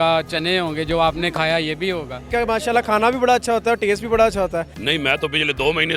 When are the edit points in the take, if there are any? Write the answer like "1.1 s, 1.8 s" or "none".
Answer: 2.3 s, 4.8 s